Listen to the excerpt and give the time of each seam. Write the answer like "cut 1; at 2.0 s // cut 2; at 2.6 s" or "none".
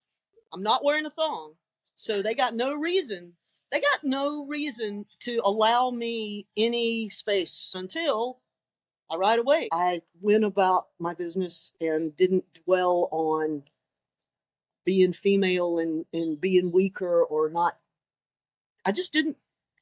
cut 1; at 7.8 s // cut 2; at 9.7 s